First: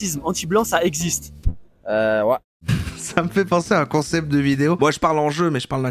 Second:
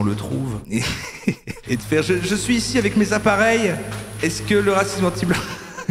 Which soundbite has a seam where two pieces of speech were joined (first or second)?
first